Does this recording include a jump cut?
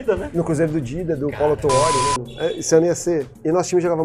yes; 1 cut; at 2.3 s

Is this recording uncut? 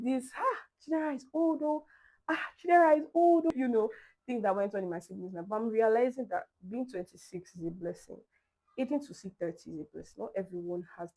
yes; 0 cuts

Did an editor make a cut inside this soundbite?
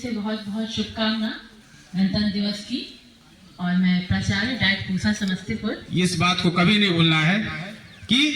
yes; 1 cut; at 5.8 s

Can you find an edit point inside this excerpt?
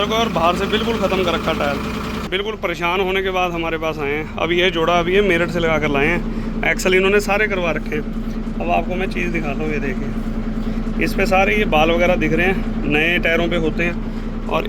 yes; 1 cut; at 2.2 s

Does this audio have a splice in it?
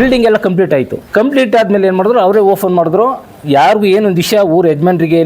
yes; 1 cut; at 1.0 s

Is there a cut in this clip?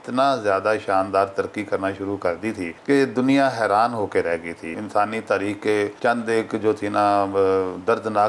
yes; 3 cuts; at 2.7 s, 4.7 s, 5.9 s

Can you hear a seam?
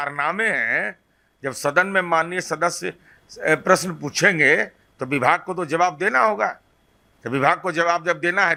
no; 0 cuts

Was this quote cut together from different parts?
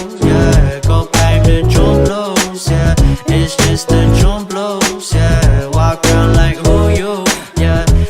yes; 1 cut; at 1.1 s

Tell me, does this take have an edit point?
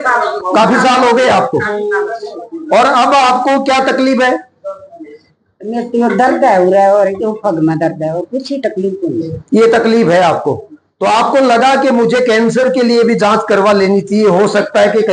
no; 0 cuts

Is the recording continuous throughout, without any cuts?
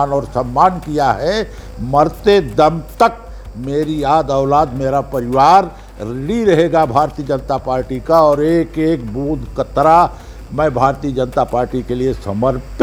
yes; 0 cuts

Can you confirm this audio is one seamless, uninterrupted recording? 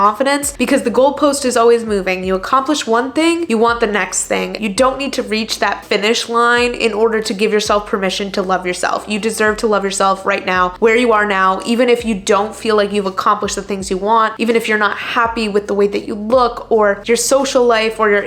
no; 1 cut; at 4.6 s

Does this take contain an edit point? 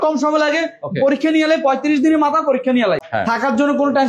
yes; 1 cut; at 3.0 s

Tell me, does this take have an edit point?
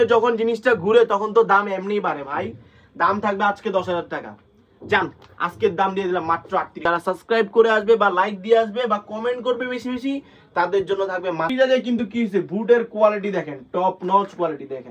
yes; 2 cuts; at 6.8 s, 11.5 s

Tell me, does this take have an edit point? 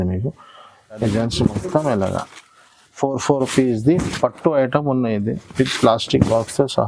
yes; 1 cut; at 1.0 s

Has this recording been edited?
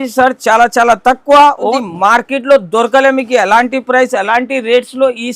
yes; 1 cut; at 1.8 s

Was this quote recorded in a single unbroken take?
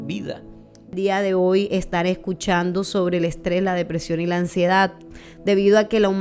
no; 1 cut; at 1.0 s

